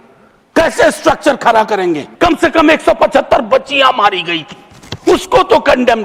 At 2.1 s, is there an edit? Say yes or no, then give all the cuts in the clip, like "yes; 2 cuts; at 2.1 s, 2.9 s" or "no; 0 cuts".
yes; 1 cut; at 2.1 s